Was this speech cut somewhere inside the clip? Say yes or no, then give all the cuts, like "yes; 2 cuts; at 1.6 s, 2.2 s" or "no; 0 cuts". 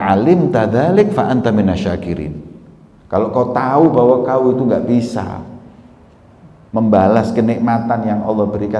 no; 0 cuts